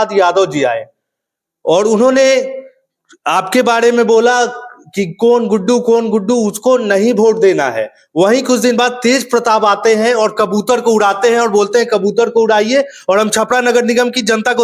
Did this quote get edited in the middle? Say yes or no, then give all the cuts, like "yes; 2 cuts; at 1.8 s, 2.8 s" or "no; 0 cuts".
no; 0 cuts